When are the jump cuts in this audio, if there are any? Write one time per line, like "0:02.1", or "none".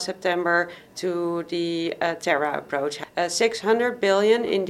0:03.0